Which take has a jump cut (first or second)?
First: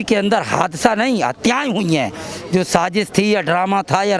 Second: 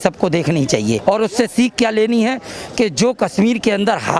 second